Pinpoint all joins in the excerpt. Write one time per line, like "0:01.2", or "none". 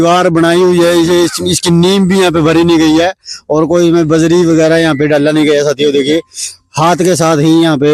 none